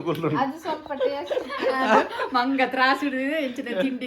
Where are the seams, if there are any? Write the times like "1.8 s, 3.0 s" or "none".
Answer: none